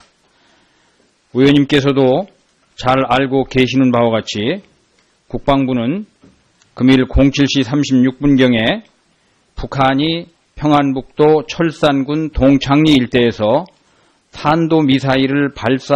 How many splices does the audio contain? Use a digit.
0